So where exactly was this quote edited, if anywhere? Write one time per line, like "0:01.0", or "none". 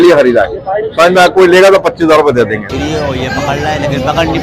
0:02.7